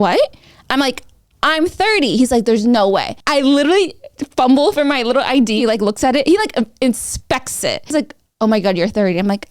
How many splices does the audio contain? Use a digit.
3